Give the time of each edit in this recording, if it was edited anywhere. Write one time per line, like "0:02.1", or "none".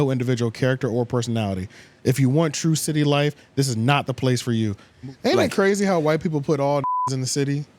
0:04.9